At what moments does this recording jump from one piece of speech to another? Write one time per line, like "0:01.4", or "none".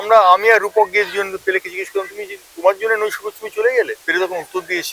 0:04.0